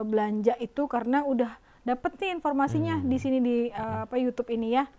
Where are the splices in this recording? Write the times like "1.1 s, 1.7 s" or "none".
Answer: none